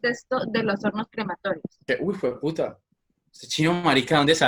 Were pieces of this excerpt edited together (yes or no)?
yes